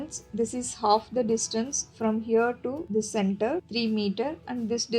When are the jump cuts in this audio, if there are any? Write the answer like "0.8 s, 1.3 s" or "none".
2.8 s, 3.7 s